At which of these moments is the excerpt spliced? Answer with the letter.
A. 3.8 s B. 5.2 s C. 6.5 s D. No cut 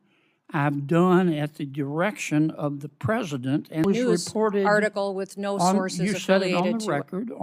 A